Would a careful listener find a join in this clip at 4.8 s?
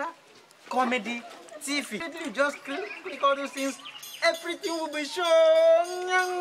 no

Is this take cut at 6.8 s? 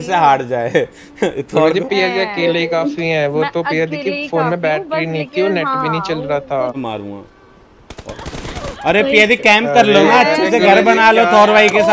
yes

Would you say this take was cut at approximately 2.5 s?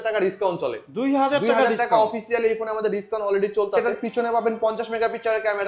no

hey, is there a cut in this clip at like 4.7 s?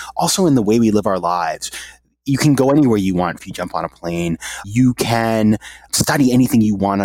yes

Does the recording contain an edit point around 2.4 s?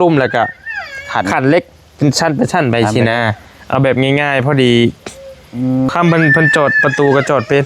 no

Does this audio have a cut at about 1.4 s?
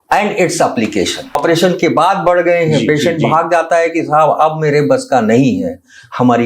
yes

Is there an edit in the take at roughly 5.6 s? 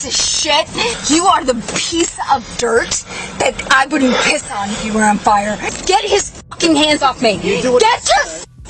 yes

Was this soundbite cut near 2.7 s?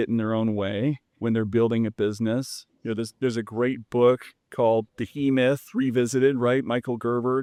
no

